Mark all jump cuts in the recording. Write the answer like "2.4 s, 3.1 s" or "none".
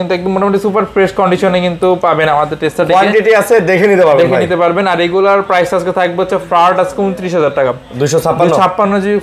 none